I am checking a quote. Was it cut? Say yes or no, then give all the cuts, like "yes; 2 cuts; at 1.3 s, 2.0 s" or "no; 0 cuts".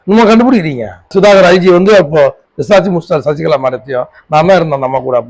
yes; 1 cut; at 0.9 s